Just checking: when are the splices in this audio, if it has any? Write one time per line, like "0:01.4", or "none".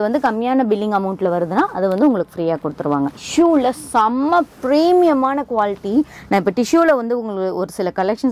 0:03.2